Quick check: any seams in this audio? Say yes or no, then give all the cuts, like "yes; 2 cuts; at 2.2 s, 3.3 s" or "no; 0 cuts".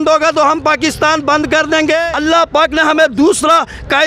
yes; 1 cut; at 2.1 s